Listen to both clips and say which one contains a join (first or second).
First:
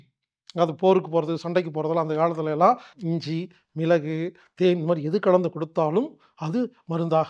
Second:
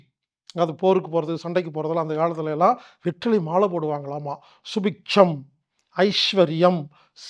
first